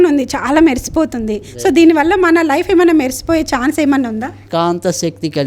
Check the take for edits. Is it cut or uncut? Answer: cut